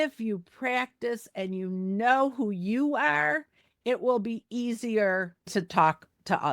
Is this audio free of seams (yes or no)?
no